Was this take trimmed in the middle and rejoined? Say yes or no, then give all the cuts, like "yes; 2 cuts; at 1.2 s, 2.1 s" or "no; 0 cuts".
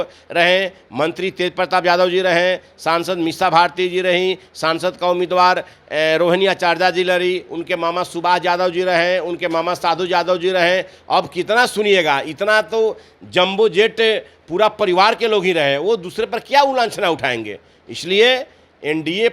no; 0 cuts